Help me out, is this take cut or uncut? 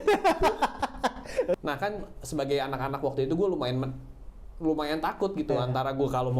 cut